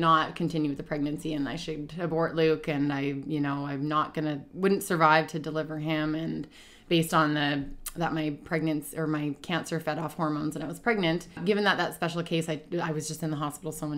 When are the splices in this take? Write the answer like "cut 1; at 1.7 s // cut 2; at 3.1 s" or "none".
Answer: cut 1; at 11.4 s